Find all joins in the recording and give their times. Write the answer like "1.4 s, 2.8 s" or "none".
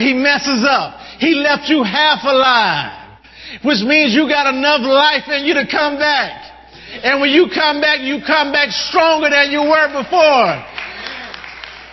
none